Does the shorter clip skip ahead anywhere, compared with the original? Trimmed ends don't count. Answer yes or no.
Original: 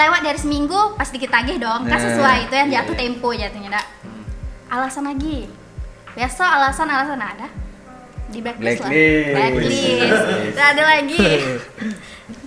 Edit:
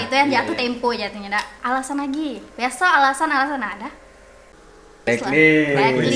yes